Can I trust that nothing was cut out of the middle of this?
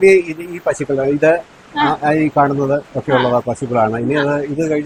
yes; 0 cuts

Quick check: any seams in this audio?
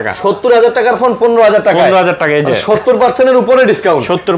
no; 0 cuts

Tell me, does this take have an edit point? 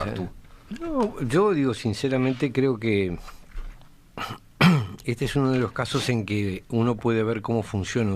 yes; 1 cut; at 4.9 s

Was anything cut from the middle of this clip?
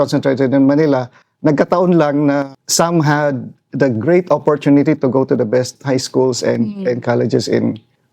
yes; 1 cut; at 2.6 s

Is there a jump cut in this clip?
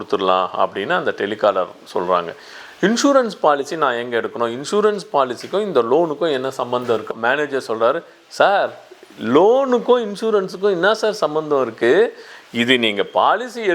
yes; 1 cut; at 7.1 s

